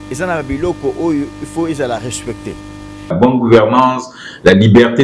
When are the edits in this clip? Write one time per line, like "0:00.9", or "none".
0:03.1